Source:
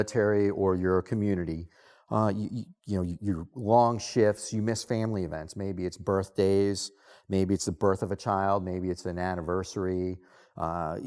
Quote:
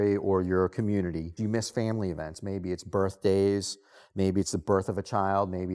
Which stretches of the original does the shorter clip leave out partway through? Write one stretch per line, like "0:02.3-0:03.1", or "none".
0:01.6-0:04.4